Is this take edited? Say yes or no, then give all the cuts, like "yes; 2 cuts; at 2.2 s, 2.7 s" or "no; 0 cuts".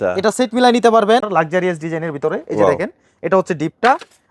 yes; 1 cut; at 1.3 s